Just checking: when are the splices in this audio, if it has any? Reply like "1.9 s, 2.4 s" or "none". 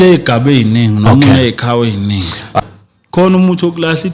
2.6 s